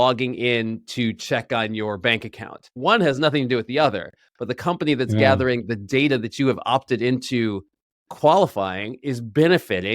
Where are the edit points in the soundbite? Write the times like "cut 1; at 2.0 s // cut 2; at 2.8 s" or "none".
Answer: cut 1; at 2.7 s